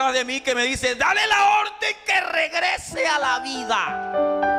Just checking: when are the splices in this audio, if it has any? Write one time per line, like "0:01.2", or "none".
none